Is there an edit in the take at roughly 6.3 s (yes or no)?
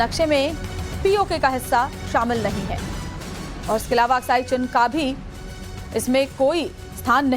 yes